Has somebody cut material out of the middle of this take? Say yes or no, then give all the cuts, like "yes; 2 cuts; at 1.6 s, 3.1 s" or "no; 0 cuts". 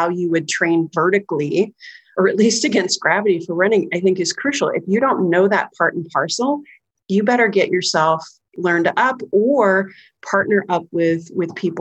yes; 2 cuts; at 2.1 s, 8.5 s